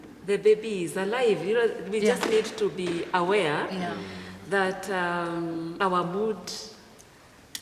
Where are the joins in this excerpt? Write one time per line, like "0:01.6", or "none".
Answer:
0:05.7